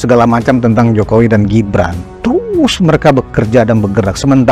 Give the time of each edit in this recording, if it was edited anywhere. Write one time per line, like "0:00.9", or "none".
0:02.1

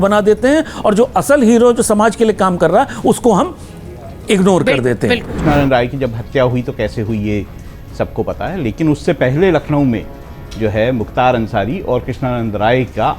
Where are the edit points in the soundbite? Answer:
0:05.3

